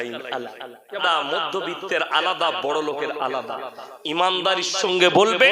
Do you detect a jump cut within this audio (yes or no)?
yes